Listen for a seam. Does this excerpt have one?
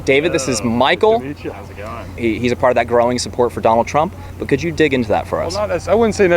yes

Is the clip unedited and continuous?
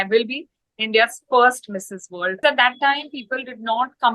no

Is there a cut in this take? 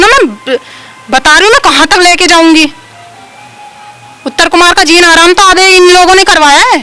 no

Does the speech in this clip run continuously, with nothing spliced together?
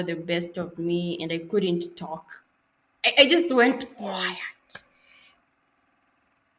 yes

